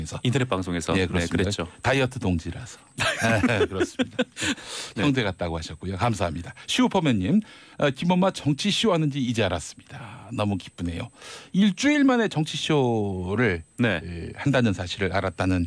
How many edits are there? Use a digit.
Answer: 1